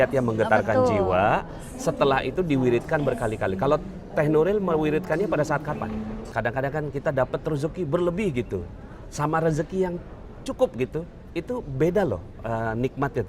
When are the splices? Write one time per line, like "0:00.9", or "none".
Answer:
0:06.2